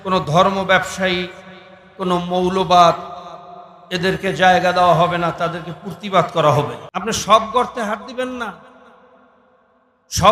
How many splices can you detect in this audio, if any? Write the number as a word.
one